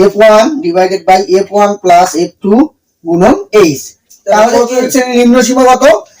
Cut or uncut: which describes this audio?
cut